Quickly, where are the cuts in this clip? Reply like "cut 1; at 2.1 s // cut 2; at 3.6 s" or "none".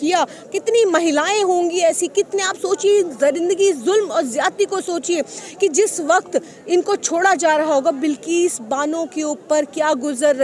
none